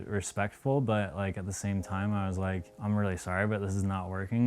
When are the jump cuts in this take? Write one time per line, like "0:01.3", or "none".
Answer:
0:02.7

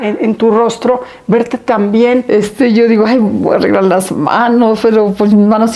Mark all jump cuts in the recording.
0:02.2

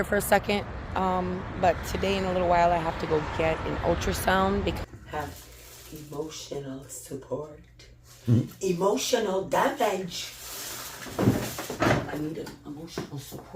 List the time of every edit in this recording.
0:04.8

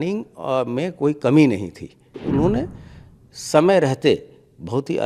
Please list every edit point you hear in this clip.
0:02.1

